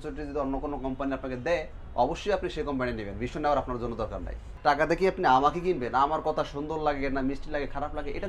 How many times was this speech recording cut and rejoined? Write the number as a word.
one